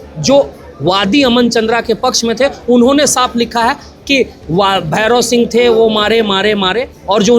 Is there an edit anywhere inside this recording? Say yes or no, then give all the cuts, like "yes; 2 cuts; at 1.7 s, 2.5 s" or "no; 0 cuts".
no; 0 cuts